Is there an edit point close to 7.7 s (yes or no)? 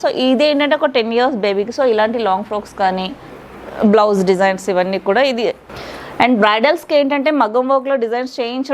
no